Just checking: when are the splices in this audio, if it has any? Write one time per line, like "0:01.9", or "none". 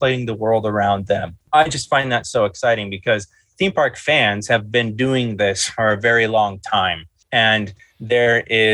0:01.3